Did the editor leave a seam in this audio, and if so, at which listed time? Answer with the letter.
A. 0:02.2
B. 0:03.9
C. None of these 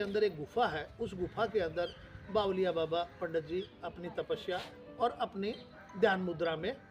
C